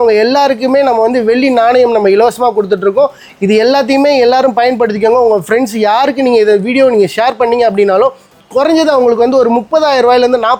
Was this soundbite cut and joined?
no; 0 cuts

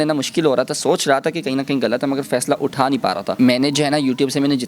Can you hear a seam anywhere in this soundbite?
yes; 1 cut; at 3.3 s

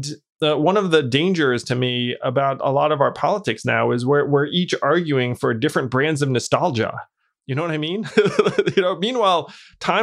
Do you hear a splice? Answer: no; 0 cuts

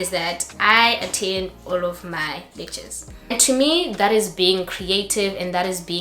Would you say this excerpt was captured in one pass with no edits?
no; 1 cut; at 3.3 s

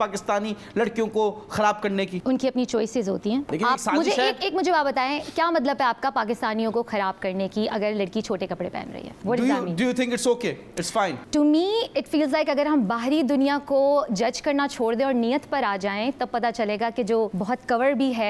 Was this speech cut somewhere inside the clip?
no; 0 cuts

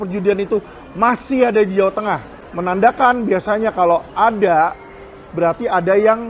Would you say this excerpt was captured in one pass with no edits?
yes; 0 cuts

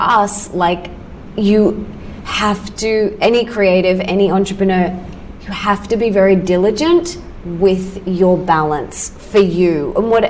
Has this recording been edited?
no; 0 cuts

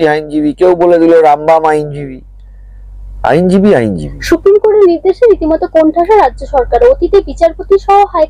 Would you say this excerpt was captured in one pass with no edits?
no; 1 cut; at 4.1 s

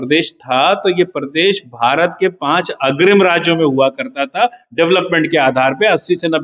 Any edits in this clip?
no; 0 cuts

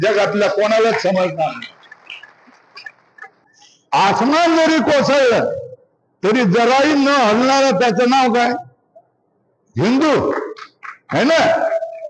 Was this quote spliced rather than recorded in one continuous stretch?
yes; 1 cut; at 3.4 s

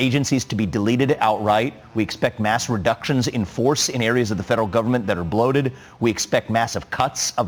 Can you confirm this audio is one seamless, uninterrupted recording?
yes; 0 cuts

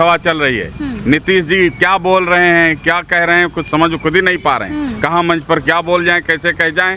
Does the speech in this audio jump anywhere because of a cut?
no; 0 cuts

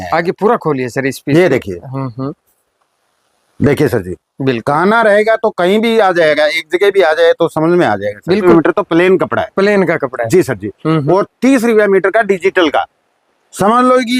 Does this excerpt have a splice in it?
yes; 1 cut; at 8.4 s

